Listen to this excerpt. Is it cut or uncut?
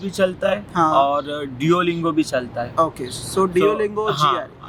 uncut